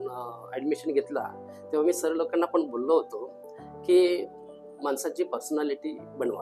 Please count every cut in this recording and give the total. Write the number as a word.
zero